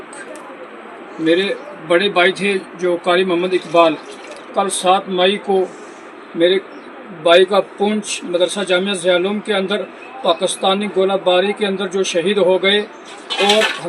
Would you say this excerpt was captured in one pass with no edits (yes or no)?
yes